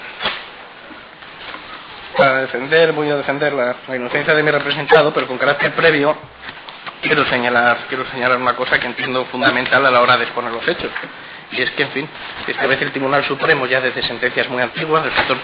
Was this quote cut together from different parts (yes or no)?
no